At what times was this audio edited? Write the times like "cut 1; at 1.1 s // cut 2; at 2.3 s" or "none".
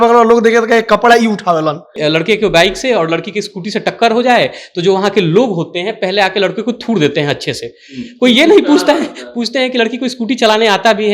cut 1; at 2.0 s